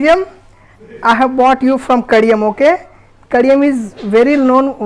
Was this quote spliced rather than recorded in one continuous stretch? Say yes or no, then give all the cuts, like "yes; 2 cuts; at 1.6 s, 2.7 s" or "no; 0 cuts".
no; 0 cuts